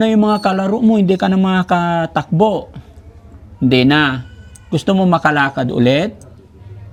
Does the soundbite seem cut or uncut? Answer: uncut